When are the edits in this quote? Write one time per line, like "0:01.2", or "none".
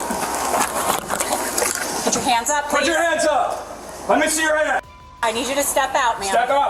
none